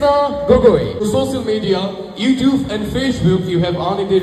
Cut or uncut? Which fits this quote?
cut